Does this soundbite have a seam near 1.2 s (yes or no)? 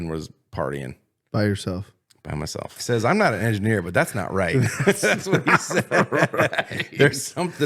no